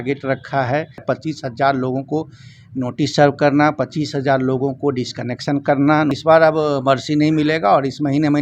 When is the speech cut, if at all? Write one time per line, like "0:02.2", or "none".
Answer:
0:01.0
0:06.2